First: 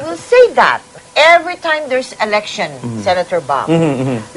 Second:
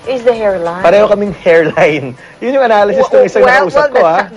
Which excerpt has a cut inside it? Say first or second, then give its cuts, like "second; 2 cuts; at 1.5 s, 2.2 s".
first; 1 cut; at 1.0 s